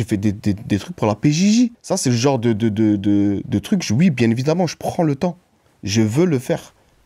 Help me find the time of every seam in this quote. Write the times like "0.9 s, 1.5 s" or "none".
1.8 s